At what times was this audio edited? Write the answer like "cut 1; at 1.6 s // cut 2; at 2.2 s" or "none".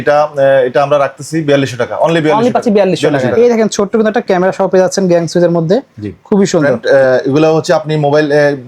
cut 1; at 3.3 s // cut 2; at 6.7 s